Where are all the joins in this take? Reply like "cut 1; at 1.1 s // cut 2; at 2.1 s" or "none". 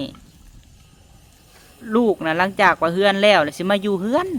none